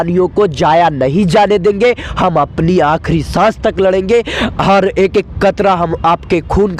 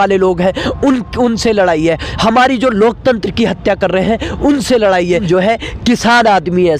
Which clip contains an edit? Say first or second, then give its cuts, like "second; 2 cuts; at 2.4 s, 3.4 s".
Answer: second; 1 cut; at 5.2 s